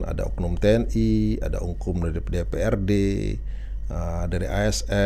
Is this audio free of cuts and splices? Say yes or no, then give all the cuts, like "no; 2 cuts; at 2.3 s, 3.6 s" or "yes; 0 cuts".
yes; 0 cuts